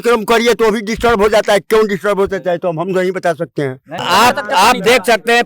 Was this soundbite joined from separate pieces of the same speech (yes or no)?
yes